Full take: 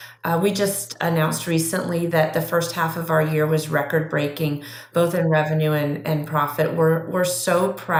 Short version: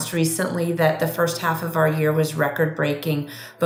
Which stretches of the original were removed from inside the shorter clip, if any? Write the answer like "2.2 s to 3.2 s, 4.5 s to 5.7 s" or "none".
none